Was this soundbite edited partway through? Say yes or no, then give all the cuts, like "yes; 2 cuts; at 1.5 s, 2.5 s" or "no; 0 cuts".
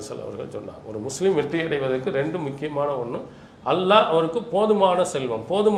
no; 0 cuts